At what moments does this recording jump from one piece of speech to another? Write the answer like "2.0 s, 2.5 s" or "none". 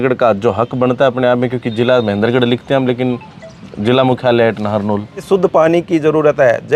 5.3 s

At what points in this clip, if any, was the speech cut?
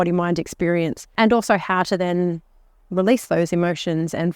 1.1 s

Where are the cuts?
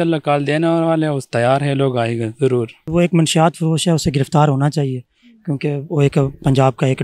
2.8 s

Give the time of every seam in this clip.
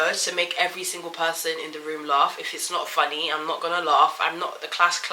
none

